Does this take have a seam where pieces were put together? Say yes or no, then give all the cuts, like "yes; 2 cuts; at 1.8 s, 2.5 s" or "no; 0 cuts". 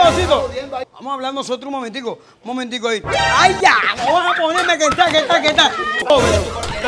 yes; 2 cuts; at 0.9 s, 6.0 s